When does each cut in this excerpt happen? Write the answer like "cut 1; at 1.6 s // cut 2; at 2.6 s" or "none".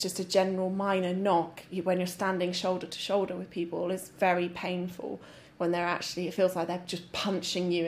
none